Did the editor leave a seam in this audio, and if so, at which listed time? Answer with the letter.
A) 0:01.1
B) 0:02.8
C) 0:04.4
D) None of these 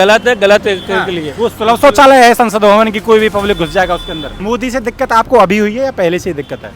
C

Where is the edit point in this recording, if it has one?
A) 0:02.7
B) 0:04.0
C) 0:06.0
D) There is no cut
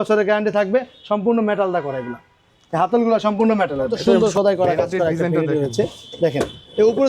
B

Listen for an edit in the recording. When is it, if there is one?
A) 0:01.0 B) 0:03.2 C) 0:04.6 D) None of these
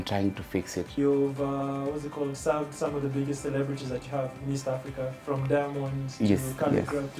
A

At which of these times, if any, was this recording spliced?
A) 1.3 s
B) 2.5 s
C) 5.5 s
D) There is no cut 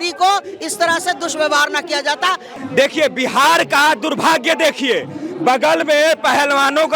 B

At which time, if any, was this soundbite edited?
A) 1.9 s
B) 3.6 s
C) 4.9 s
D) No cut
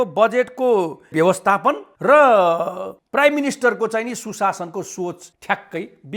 A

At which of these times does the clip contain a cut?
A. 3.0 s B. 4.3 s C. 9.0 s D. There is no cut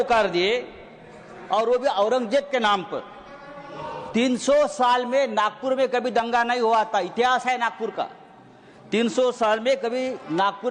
D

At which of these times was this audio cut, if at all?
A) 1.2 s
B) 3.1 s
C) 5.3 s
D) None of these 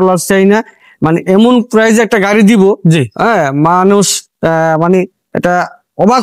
D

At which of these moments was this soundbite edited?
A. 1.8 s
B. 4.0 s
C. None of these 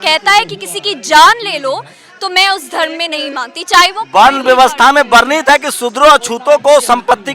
C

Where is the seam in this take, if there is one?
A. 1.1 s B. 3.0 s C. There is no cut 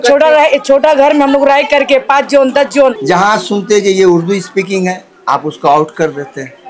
B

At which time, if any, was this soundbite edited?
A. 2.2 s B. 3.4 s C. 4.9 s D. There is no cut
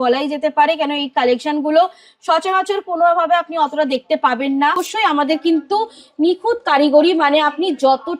C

